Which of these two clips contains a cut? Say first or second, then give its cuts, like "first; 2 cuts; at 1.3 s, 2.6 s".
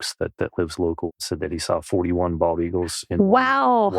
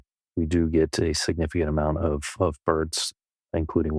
first; 1 cut; at 1.1 s